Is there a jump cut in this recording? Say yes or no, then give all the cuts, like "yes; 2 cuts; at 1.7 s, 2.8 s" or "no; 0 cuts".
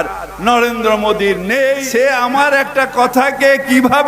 yes; 1 cut; at 1.8 s